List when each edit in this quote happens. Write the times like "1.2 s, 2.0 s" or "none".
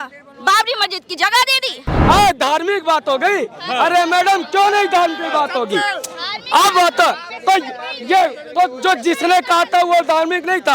1.9 s